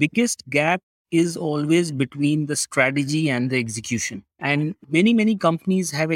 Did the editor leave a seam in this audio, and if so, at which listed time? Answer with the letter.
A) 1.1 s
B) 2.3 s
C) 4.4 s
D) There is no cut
D